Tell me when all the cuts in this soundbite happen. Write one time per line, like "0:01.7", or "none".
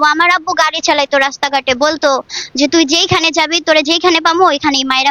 none